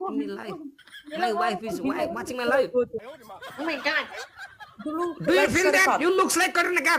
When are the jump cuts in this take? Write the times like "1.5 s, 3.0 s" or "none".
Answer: 3.0 s

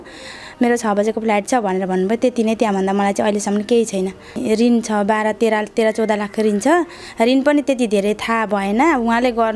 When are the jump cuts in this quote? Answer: 4.4 s

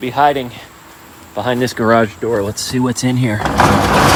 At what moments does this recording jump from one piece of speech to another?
none

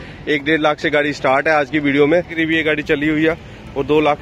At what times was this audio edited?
2.4 s

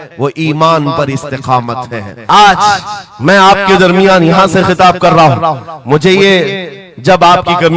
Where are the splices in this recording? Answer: 2.1 s

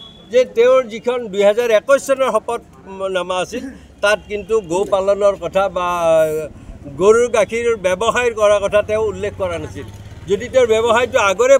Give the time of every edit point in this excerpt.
none

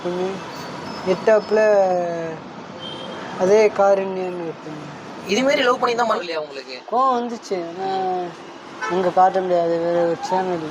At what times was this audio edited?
6.2 s

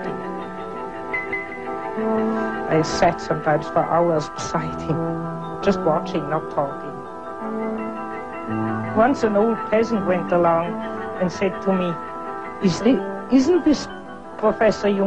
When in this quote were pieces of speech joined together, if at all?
13.6 s

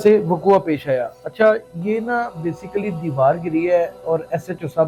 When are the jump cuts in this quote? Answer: none

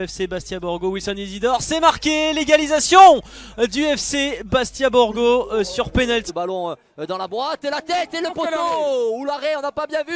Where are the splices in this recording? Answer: 6.2 s

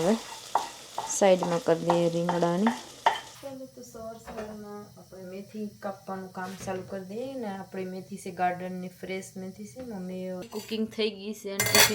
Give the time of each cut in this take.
3.3 s, 10.4 s

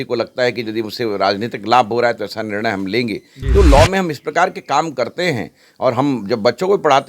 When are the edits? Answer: 3.4 s

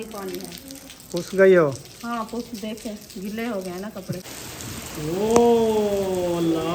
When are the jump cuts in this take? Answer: 4.2 s

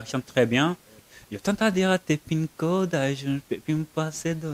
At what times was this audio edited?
1.0 s

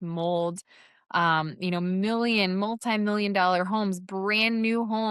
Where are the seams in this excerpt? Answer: none

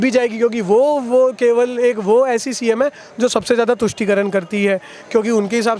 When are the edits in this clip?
none

